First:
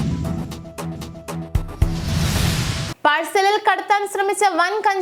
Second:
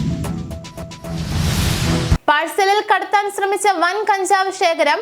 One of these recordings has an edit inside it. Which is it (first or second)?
second